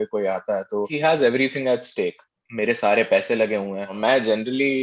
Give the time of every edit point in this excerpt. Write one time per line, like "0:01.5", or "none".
0:00.9
0:02.4
0:03.9